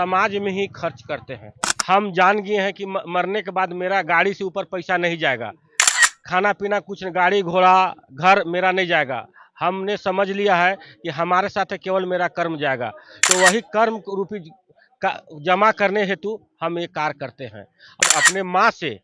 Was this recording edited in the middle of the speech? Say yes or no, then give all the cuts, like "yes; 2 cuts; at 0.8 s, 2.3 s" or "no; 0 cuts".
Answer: yes; 2 cuts; at 1.7 s, 18.0 s